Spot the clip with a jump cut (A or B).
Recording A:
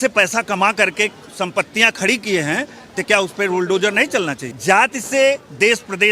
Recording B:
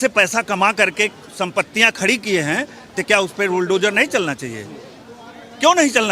A